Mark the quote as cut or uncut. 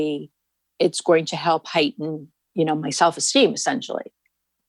uncut